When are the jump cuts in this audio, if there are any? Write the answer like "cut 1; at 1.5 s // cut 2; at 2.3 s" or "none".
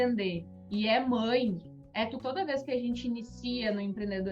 cut 1; at 2.2 s

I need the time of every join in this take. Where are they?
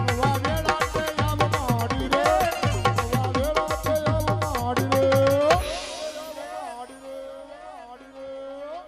cut 1; at 7.3 s

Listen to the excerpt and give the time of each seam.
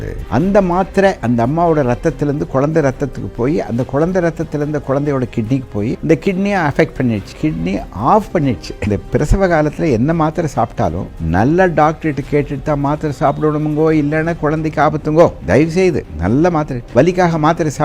cut 1; at 15.8 s // cut 2; at 16.8 s

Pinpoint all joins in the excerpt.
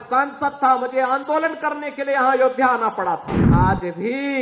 cut 1; at 3.4 s

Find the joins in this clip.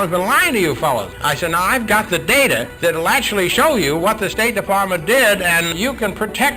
cut 1; at 1.1 s // cut 2; at 2.7 s // cut 3; at 5.7 s

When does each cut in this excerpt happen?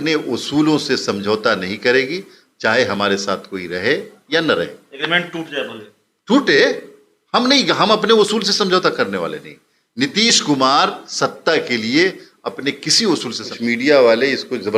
cut 1; at 13.5 s

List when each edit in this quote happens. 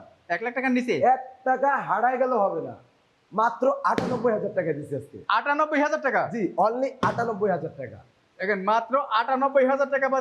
none

